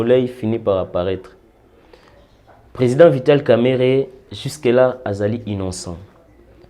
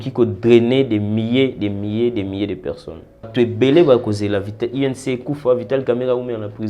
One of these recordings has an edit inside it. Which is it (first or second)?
second